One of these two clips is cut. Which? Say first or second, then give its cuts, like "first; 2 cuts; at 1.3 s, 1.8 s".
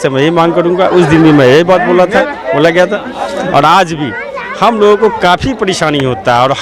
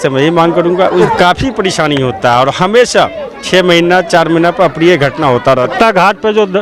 second; 2 cuts; at 1.0 s, 5.7 s